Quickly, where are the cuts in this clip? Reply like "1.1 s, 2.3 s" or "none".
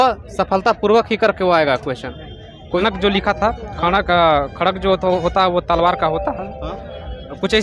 2.8 s